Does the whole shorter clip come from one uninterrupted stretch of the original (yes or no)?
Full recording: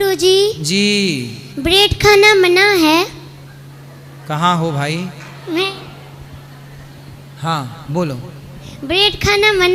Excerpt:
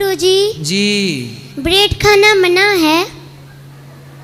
yes